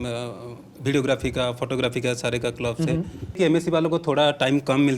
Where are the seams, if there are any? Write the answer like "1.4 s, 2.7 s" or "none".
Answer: 3.4 s